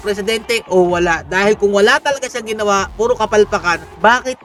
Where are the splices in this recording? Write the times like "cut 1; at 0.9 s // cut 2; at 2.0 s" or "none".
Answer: none